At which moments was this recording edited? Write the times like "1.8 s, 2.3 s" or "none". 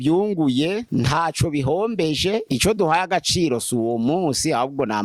none